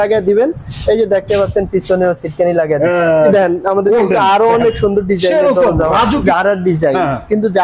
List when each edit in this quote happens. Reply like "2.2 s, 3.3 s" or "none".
3.3 s, 6.2 s